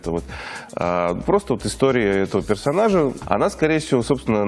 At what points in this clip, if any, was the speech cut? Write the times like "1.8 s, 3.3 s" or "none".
3.2 s